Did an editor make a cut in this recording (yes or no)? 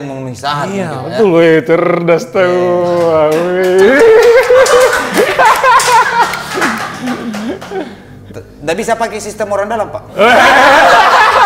no